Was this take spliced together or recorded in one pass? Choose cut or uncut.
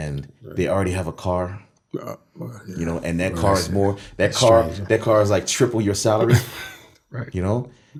uncut